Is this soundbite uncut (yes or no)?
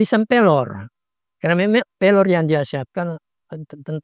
yes